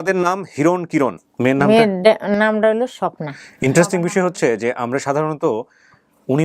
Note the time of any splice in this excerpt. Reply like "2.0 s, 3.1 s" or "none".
1.2 s